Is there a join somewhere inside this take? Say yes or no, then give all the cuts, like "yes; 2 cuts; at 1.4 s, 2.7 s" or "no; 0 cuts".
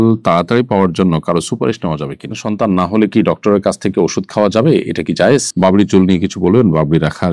yes; 2 cuts; at 2.4 s, 5.5 s